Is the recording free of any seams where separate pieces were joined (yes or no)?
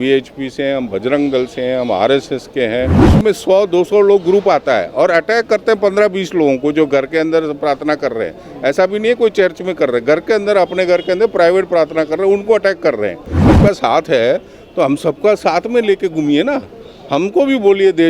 no